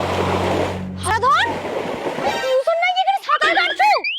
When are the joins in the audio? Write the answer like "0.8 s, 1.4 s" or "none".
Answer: 1.1 s